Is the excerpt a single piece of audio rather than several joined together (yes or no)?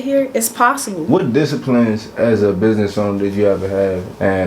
no